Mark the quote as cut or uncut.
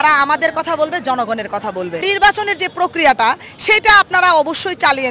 cut